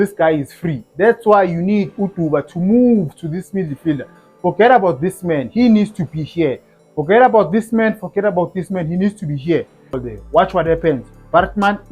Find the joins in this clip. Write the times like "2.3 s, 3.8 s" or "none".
10.1 s